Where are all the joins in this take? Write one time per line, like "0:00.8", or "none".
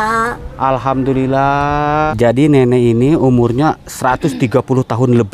0:02.1